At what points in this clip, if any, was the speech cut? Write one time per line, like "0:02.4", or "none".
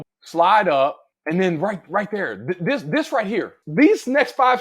0:01.1
0:03.6